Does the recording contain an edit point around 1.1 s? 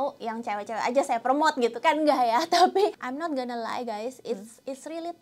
no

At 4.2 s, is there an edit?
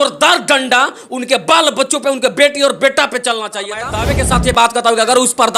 yes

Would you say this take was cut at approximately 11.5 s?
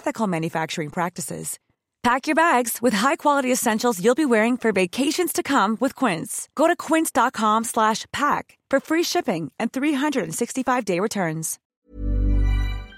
yes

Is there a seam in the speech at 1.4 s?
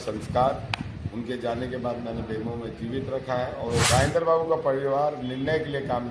no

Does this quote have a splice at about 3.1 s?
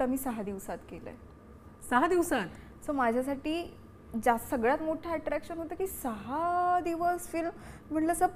no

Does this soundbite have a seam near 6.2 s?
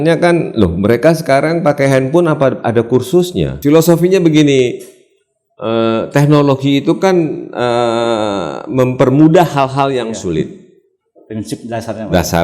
no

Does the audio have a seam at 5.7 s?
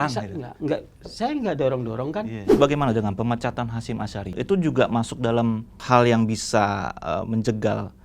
yes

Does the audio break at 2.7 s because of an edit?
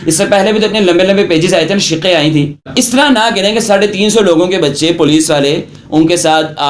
yes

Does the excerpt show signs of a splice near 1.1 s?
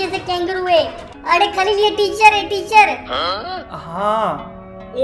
yes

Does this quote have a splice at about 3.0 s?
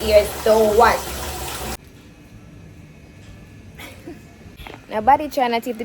no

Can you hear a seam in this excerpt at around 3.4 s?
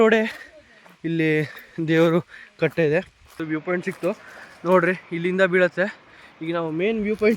yes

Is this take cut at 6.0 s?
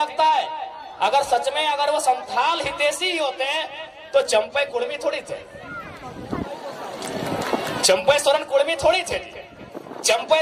no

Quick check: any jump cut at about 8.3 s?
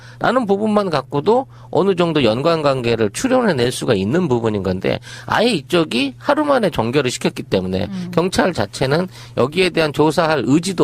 yes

